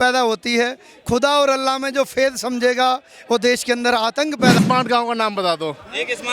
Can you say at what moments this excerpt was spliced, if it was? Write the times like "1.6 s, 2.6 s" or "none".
4.6 s